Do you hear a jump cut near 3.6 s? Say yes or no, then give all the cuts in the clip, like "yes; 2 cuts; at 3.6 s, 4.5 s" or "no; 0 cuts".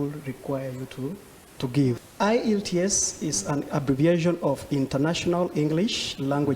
no; 1 cut; at 2.1 s